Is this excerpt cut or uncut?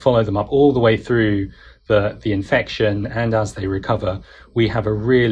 uncut